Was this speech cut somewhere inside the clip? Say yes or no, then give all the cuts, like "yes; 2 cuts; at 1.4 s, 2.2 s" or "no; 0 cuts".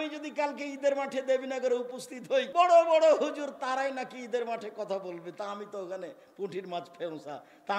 yes; 1 cut; at 2.5 s